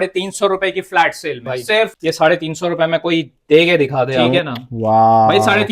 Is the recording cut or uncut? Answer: cut